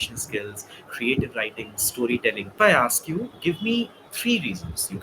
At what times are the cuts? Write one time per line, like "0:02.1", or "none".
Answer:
0:02.5